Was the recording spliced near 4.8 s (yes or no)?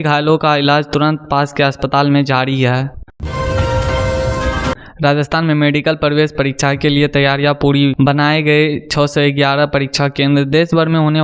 yes